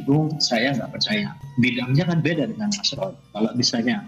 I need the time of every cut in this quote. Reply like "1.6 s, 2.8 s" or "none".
1.4 s

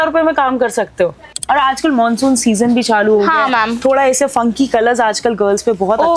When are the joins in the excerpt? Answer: 1.4 s

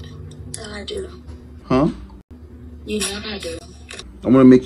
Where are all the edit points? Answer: 3.6 s

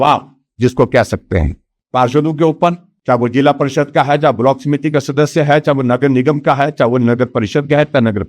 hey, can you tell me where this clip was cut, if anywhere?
none

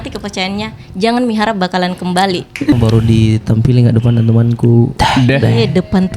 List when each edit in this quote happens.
2.7 s

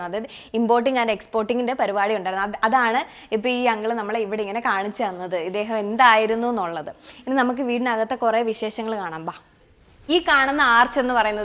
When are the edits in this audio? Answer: 10.0 s

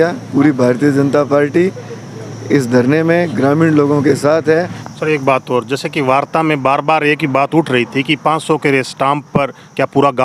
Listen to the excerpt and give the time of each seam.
4.8 s

